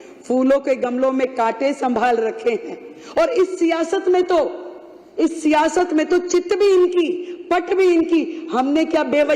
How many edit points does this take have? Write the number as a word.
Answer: zero